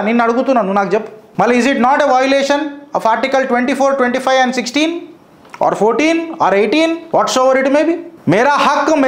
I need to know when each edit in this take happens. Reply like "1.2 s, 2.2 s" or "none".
1.2 s, 7.0 s, 8.1 s